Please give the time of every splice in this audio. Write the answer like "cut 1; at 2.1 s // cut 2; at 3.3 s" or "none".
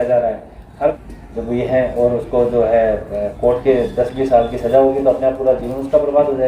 cut 1; at 1.0 s